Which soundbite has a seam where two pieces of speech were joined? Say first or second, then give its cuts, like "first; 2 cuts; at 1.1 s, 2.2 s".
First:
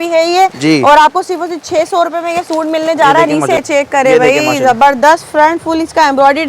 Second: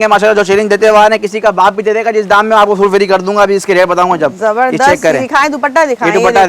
first; 1 cut; at 3.6 s